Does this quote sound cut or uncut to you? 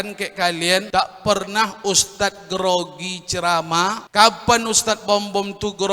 cut